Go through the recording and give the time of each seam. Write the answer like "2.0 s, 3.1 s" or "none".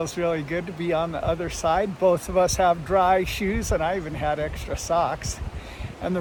none